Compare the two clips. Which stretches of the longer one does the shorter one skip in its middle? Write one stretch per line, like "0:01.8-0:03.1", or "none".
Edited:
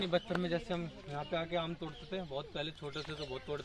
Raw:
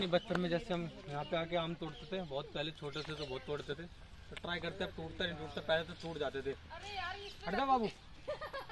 none